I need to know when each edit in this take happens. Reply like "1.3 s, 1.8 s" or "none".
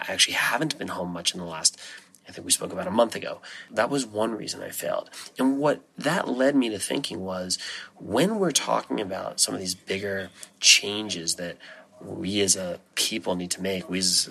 3.6 s, 12.9 s

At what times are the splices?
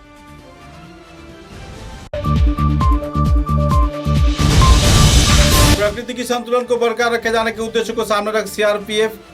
2.0 s, 5.7 s

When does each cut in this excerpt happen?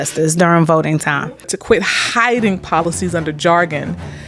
1.6 s

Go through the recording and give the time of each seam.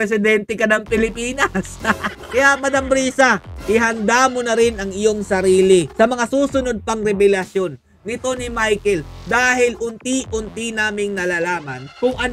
2.1 s

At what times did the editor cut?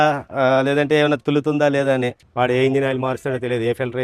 2.2 s

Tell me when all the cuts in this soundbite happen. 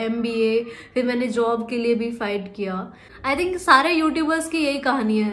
3.2 s

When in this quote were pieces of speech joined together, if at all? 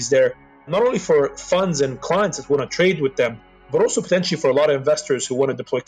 none

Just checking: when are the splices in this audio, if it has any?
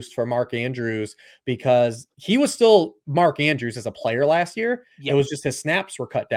none

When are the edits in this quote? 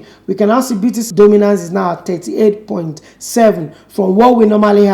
1.1 s

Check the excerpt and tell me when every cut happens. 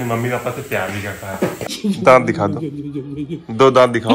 1.7 s

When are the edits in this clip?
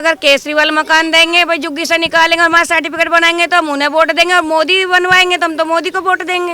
none

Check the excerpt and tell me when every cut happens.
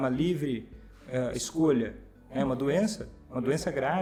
none

